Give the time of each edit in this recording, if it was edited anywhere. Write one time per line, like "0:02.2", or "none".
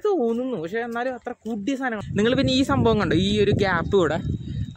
0:02.0